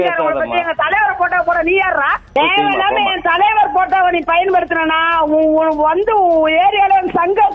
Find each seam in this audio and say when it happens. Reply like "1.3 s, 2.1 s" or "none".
2.4 s